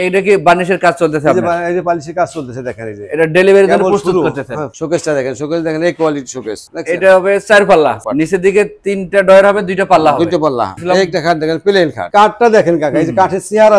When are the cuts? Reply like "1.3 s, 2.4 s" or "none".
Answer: 4.7 s, 6.6 s, 8.0 s, 10.7 s, 12.0 s